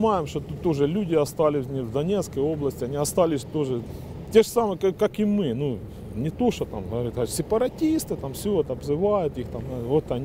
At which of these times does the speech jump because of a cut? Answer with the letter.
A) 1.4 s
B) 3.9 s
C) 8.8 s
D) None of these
B